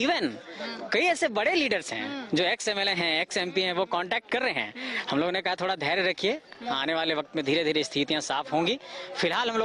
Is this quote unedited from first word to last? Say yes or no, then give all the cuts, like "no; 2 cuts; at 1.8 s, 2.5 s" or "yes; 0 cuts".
yes; 0 cuts